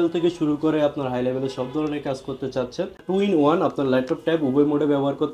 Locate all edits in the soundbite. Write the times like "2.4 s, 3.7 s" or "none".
3.0 s